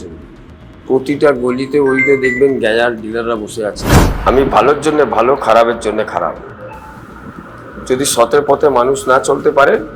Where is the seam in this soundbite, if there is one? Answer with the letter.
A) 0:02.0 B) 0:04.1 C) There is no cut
B